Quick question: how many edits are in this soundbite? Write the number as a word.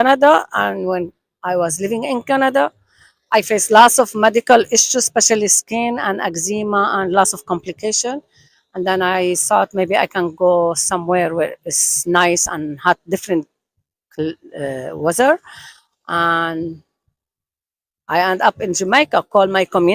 zero